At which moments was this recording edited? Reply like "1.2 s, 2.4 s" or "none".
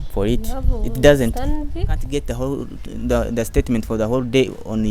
2.0 s